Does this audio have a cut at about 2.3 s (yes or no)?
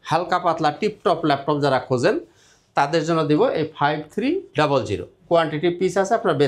no